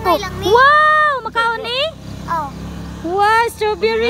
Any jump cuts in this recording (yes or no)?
no